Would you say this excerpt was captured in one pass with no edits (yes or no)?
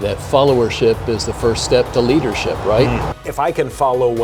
no